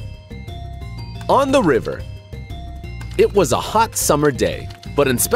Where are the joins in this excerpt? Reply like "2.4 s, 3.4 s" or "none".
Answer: 1.2 s